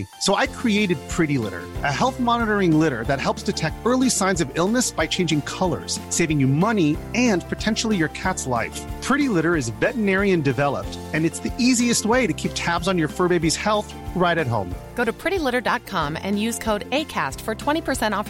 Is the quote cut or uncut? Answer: uncut